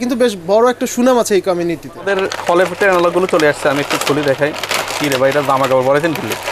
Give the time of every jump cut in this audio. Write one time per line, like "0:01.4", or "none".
0:02.1